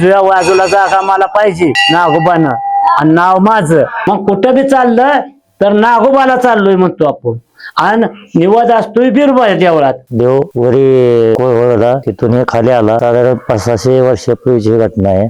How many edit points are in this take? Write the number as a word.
three